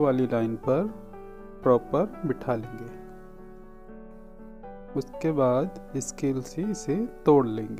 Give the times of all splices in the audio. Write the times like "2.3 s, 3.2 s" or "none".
none